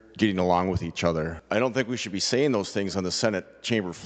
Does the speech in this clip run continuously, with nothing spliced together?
no; 1 cut; at 1.4 s

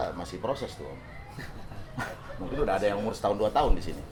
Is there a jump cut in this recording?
no; 0 cuts

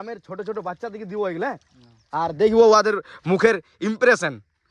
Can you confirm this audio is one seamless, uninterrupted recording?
yes; 0 cuts

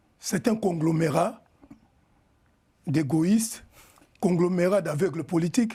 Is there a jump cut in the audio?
no; 0 cuts

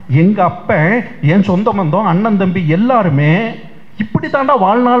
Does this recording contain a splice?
no; 0 cuts

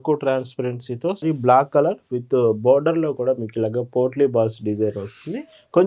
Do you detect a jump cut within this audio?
yes; 1 cut; at 1.2 s

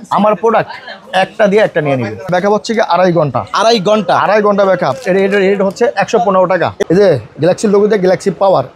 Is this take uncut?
no; 2 cuts; at 2.3 s, 6.8 s

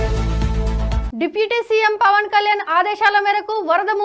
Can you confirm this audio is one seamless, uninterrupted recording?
yes; 0 cuts

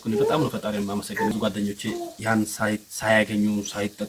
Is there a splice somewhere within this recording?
yes; 1 cut; at 1.3 s

